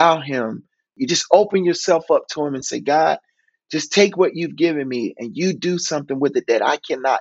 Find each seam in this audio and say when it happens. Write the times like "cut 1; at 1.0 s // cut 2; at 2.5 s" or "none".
cut 1; at 0.9 s